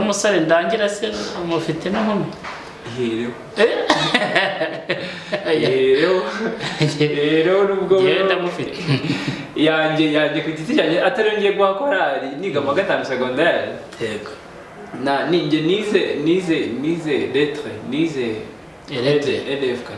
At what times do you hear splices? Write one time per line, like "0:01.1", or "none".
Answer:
0:08.7

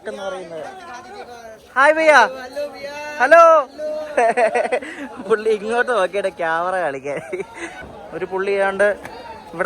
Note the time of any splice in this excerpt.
0:07.8

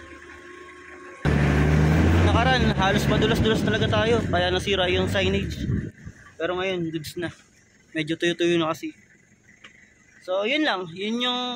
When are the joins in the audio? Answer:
0:01.2

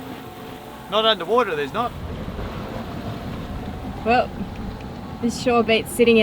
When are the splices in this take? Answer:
0:02.2

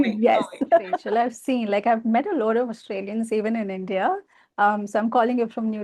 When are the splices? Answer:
0:01.0

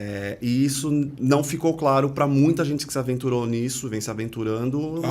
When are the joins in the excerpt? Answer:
0:01.1

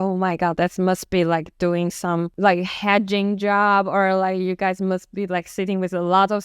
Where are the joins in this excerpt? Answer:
0:02.3

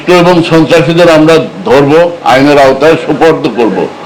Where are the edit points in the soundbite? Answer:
none

